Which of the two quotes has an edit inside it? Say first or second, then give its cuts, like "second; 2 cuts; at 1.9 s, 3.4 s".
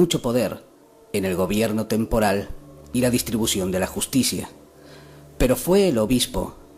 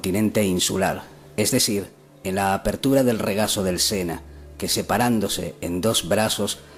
first; 1 cut; at 2.5 s